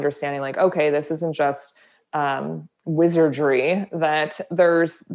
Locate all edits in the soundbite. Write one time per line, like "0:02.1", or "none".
none